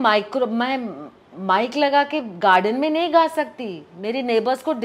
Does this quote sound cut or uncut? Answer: uncut